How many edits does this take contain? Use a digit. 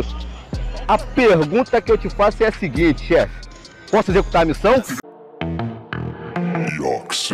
1